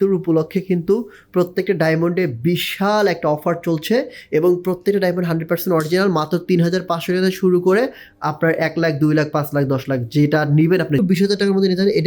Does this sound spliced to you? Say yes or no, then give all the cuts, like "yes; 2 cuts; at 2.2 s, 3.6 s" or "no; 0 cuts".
yes; 1 cut; at 11.0 s